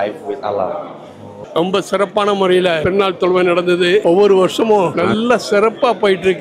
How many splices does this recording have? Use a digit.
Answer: 4